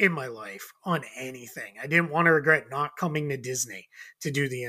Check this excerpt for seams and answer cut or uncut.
uncut